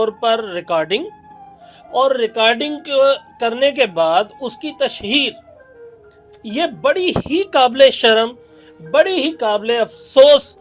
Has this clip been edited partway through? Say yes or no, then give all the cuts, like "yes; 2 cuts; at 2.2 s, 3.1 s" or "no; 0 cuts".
no; 0 cuts